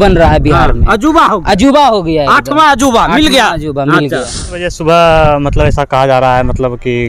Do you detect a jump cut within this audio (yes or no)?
yes